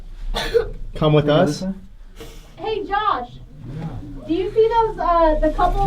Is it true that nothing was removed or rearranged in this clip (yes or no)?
no